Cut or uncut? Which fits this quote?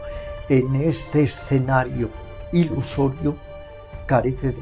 uncut